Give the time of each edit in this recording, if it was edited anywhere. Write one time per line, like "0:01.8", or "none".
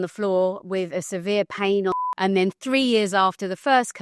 0:01.9